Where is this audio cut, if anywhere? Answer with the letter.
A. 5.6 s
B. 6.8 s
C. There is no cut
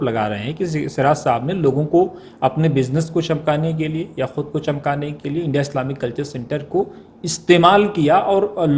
C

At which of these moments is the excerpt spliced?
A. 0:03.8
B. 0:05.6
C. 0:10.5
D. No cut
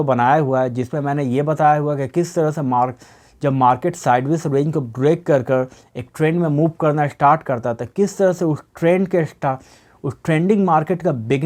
D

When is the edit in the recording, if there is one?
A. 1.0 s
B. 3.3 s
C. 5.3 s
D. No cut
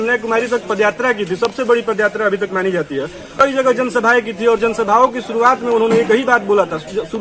B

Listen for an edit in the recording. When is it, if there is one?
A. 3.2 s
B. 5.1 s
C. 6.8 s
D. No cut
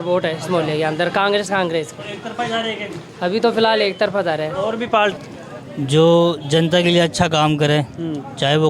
B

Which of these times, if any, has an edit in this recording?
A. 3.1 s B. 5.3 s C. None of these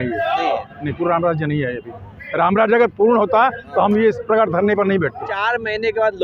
B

